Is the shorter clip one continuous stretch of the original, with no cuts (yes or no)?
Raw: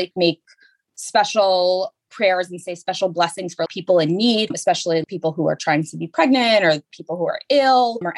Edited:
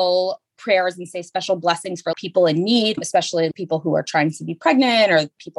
yes